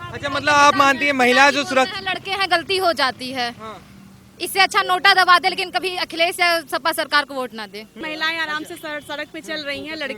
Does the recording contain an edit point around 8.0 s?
yes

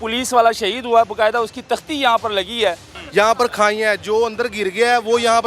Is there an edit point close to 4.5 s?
no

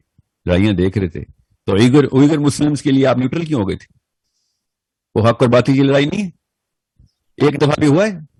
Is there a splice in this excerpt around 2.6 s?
no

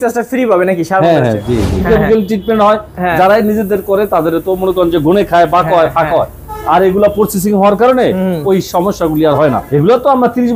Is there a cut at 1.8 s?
yes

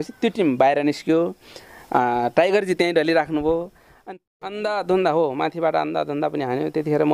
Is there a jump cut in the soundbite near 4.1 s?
yes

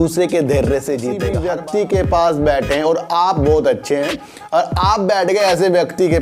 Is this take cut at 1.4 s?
yes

